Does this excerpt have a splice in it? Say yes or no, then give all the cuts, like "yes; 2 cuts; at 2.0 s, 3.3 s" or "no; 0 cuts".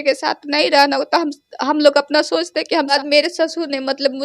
yes; 1 cut; at 2.9 s